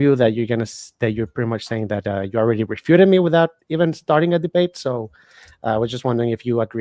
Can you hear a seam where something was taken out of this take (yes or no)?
no